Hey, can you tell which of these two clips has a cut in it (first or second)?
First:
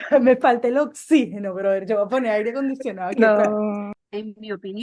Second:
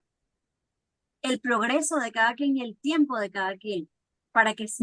first